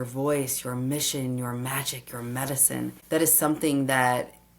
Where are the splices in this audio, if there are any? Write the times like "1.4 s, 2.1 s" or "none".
3.0 s